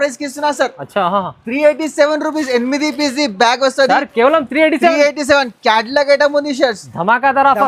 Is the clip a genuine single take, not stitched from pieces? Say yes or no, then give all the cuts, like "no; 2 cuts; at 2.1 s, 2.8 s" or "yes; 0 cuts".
yes; 0 cuts